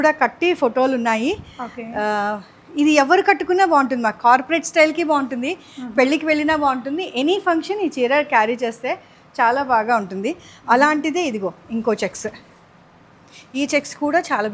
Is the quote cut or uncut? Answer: uncut